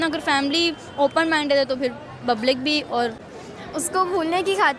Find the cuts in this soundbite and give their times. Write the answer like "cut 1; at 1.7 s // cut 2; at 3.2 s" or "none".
cut 1; at 3.2 s